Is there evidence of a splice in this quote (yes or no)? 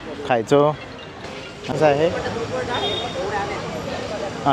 yes